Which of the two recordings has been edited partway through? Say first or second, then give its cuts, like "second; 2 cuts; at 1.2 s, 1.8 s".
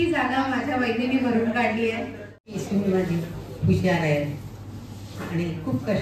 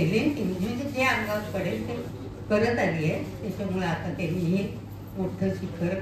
first; 1 cut; at 2.5 s